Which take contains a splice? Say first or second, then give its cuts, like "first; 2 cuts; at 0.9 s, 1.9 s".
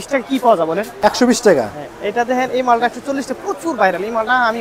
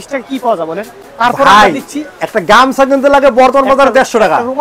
first; 1 cut; at 0.9 s